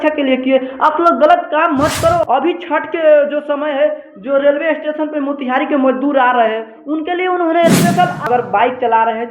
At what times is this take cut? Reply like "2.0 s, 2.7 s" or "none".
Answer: 2.2 s, 8.3 s